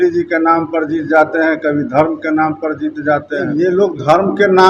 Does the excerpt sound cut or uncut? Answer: cut